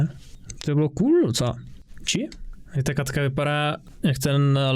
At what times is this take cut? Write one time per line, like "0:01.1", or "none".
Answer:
0:02.6

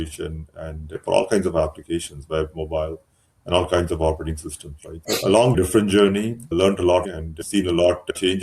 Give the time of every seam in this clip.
0:05.5
0:06.4
0:07.0

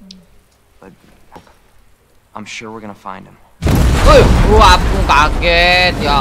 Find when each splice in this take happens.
0:01.4

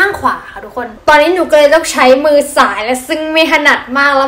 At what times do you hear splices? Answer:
0:00.9

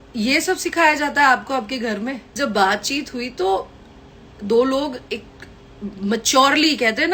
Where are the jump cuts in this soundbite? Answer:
0:02.3

